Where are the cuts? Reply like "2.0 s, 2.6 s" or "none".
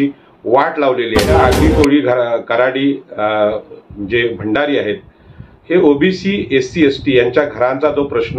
1.3 s